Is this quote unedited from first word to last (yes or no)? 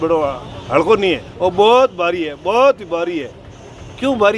yes